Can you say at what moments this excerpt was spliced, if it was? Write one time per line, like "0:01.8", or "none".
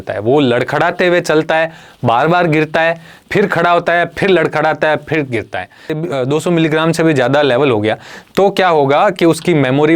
0:06.0